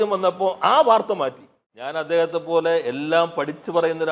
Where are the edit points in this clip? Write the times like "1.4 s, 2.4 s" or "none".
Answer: 2.0 s